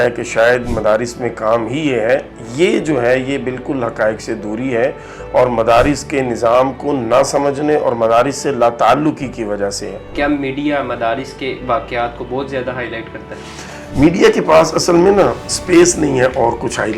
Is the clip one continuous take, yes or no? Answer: no